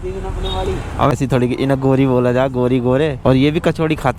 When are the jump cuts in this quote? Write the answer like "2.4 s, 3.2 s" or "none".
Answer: 1.1 s, 3.2 s